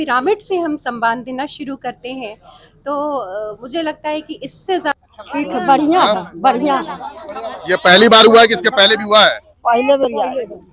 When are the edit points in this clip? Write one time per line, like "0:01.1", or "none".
0:05.0

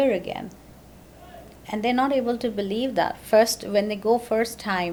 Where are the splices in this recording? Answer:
none

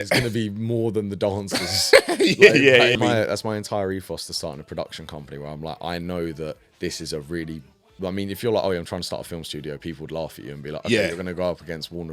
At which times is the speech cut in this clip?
0:02.9

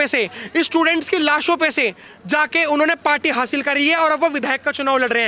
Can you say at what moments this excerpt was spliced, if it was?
none

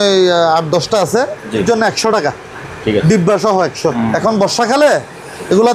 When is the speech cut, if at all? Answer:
0:01.6
0:04.0

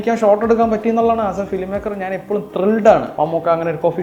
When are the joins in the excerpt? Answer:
0:03.1

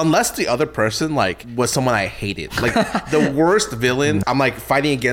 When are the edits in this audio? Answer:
0:01.4
0:04.2

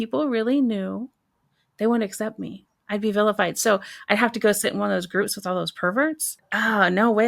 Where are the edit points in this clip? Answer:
0:06.3

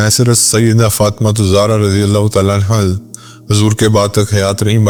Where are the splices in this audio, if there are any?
none

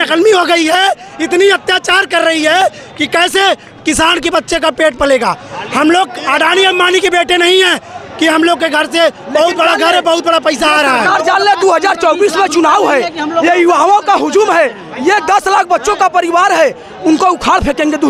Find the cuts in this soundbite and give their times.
none

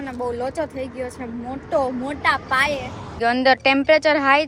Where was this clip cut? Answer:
0:03.2

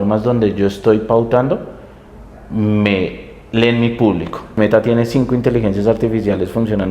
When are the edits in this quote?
0:04.5

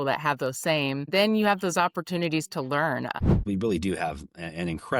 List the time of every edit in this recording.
0:01.1
0:03.2

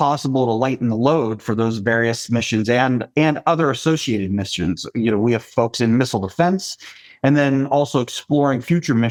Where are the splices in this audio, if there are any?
none

